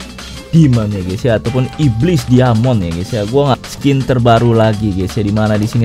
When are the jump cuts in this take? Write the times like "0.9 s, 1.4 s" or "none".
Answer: 3.6 s